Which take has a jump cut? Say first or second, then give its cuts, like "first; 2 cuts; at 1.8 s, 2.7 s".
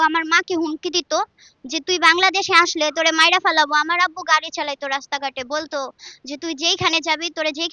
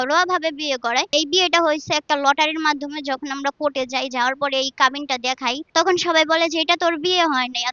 second; 2 cuts; at 1.1 s, 5.6 s